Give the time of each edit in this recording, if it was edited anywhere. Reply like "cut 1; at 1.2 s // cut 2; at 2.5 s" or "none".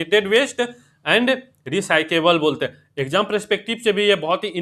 none